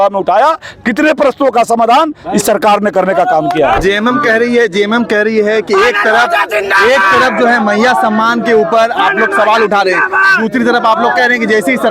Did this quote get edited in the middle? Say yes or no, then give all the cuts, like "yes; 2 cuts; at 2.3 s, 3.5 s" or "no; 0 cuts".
yes; 1 cut; at 3.8 s